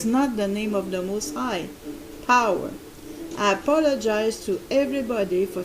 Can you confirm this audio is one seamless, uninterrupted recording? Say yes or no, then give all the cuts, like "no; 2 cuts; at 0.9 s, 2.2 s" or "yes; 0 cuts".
no; 1 cut; at 2.2 s